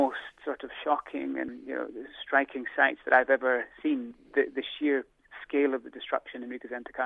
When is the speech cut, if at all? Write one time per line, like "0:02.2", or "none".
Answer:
0:04.1